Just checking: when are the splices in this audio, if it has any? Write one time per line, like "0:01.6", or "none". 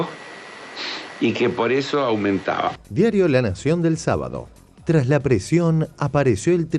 0:02.8